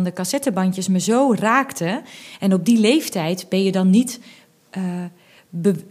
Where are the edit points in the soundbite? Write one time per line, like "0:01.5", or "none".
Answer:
none